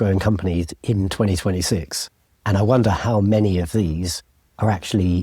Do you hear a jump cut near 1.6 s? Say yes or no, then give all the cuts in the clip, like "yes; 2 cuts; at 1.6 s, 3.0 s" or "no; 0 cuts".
no; 0 cuts